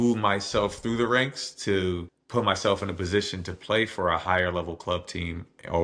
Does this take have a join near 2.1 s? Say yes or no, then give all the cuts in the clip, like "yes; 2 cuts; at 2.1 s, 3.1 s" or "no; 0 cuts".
yes; 1 cut; at 2.1 s